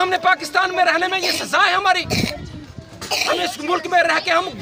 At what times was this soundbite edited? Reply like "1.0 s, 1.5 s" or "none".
none